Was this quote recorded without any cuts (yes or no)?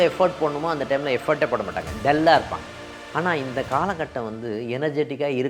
yes